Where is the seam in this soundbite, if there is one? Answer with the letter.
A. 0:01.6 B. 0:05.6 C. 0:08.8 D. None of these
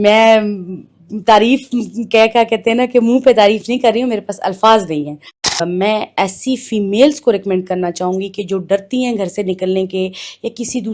B